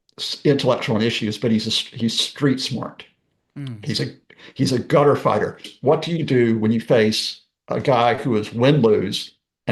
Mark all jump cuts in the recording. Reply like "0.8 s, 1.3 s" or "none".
5.7 s